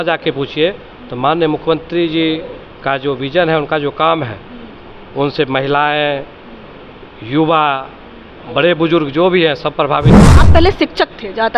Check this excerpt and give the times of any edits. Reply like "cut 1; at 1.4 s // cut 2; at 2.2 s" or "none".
cut 1; at 10.2 s